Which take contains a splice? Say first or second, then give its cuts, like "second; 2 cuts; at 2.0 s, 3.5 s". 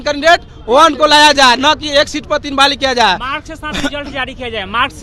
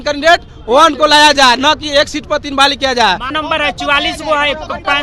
second; 1 cut; at 3.3 s